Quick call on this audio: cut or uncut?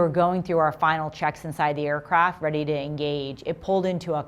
uncut